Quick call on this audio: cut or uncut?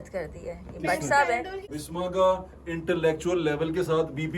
cut